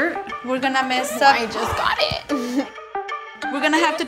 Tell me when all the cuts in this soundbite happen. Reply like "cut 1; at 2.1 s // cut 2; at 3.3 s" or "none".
cut 1; at 3.2 s